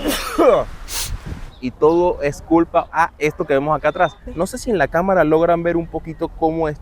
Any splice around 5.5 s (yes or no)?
no